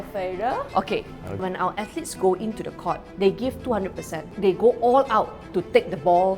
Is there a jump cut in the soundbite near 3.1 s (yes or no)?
yes